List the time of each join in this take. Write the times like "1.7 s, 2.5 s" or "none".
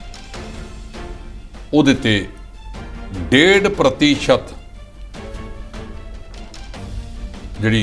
none